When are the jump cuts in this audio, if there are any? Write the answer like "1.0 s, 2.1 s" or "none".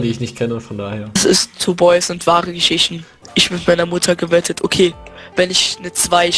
3.1 s